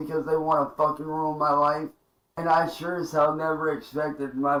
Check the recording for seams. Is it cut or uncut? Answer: uncut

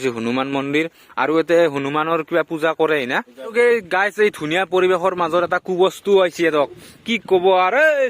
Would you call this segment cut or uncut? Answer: cut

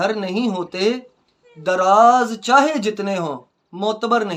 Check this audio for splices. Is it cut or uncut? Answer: uncut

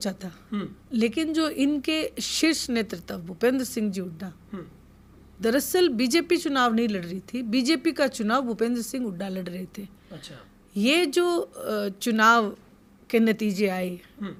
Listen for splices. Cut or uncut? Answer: uncut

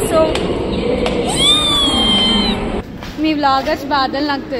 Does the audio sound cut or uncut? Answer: cut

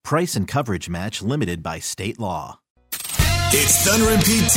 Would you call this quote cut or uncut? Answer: cut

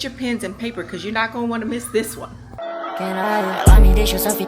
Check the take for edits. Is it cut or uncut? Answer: cut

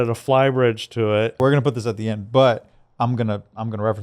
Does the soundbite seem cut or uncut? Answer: cut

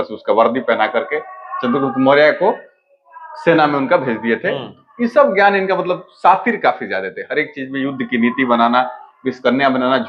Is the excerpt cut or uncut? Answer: uncut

